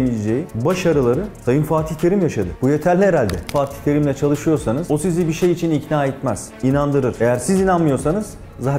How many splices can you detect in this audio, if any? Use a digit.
3